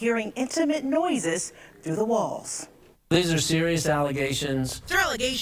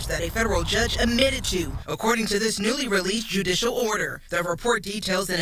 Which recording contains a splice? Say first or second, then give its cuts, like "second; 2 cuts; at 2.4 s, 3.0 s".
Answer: first; 1 cut; at 2.8 s